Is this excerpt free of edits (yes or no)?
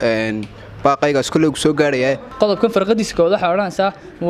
no